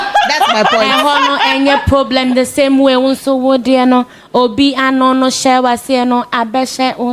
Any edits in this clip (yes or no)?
no